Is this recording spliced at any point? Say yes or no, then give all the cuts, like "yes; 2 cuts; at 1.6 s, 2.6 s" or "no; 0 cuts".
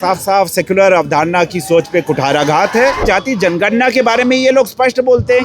yes; 1 cut; at 3.0 s